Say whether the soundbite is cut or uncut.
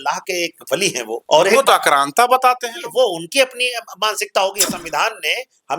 cut